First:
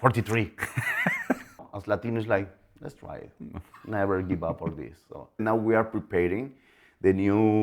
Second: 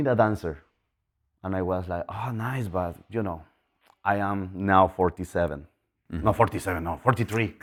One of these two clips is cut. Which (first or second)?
first